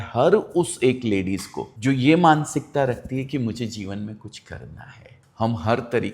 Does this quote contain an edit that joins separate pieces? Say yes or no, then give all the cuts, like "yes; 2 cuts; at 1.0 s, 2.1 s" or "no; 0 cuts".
yes; 1 cut; at 5.2 s